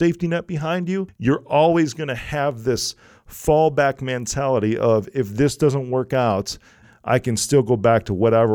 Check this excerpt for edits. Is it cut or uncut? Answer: cut